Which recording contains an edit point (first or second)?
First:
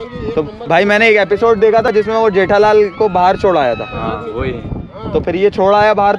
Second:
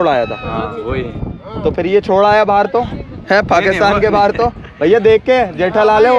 first